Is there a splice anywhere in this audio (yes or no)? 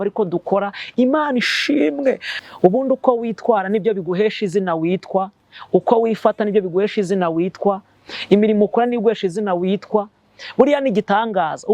yes